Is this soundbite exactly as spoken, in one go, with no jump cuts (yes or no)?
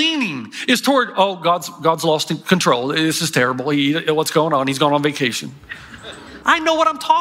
no